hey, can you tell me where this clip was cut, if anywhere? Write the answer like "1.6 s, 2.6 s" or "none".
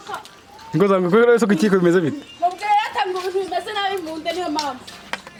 none